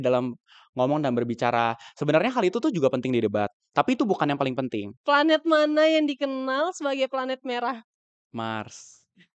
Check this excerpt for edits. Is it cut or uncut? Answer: cut